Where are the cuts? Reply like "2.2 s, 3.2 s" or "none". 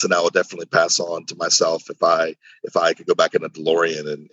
none